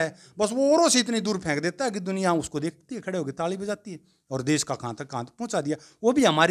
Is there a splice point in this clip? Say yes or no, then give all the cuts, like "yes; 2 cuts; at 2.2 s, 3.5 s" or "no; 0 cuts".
no; 0 cuts